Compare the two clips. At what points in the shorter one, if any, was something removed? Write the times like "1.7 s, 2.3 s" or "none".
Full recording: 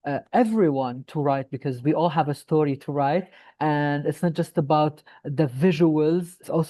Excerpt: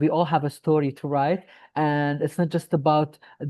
none